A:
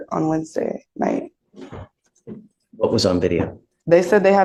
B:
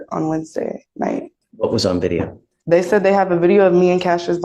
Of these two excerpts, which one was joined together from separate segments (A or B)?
B